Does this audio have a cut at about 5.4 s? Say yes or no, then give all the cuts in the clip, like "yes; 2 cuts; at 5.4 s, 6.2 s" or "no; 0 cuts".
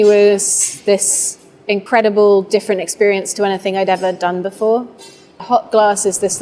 yes; 2 cuts; at 1.8 s, 5.4 s